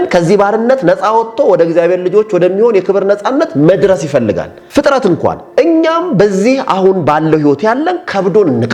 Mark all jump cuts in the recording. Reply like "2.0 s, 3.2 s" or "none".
4.5 s

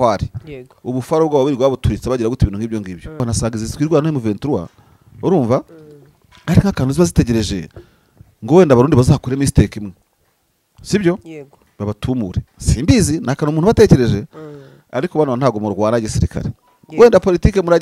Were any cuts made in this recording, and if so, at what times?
3.2 s

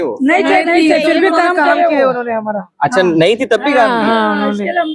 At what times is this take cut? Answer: none

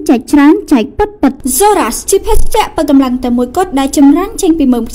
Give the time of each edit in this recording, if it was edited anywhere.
1.4 s

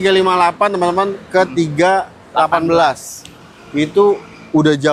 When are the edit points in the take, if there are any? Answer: none

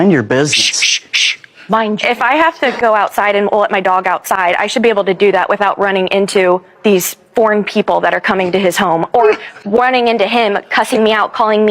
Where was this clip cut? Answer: none

